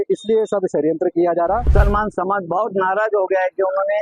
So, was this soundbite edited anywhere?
yes; 1 cut; at 1.6 s

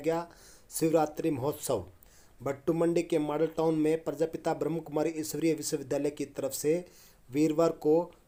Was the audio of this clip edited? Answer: no; 0 cuts

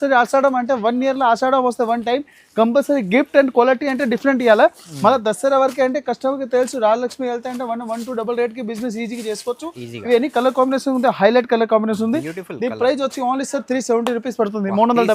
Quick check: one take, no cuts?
yes; 0 cuts

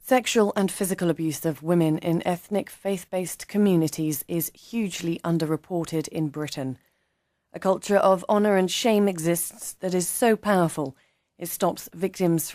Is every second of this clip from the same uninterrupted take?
yes; 0 cuts

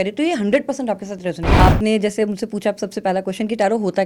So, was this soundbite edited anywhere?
yes; 1 cut; at 1.6 s

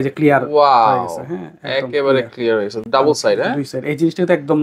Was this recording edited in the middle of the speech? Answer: no; 0 cuts

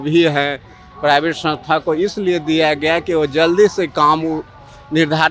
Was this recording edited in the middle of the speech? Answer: no; 0 cuts

